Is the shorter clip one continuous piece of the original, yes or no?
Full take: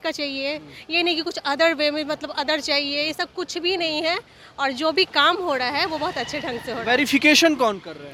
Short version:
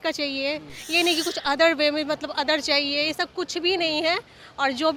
yes